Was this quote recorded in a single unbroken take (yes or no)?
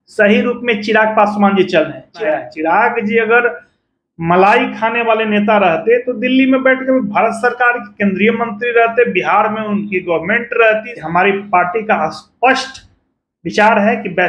no